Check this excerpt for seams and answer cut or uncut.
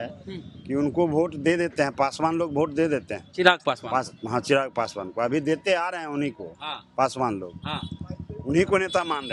uncut